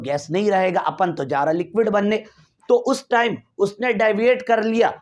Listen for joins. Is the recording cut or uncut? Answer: uncut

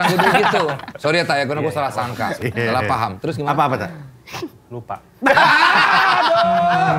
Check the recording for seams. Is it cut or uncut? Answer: uncut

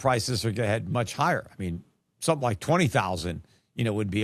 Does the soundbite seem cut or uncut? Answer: uncut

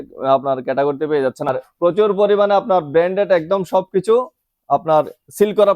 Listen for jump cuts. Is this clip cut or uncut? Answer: cut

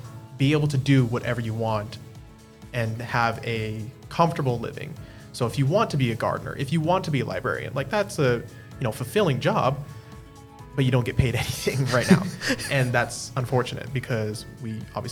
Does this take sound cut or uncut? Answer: uncut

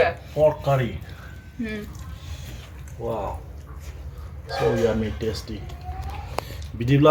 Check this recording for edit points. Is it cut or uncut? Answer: uncut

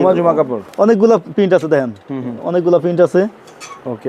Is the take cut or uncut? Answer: uncut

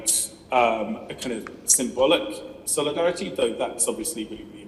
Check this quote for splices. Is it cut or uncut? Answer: uncut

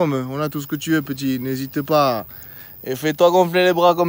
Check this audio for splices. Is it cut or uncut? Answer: uncut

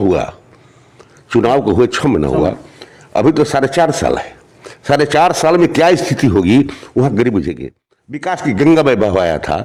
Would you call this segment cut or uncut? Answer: uncut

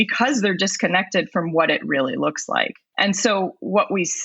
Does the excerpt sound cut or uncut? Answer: cut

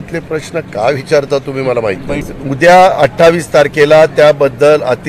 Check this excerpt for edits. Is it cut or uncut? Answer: cut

